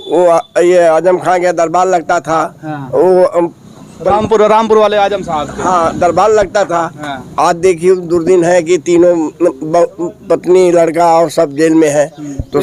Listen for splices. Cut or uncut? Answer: uncut